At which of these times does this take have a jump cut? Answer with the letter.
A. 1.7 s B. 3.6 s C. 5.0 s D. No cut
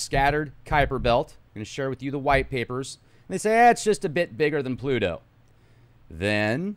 A